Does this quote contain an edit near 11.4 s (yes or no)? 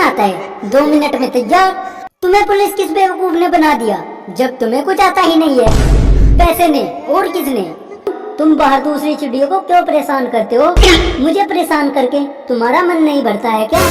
no